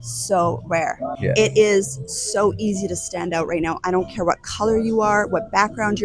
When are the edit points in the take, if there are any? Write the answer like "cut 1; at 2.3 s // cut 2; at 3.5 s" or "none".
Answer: cut 1; at 1.2 s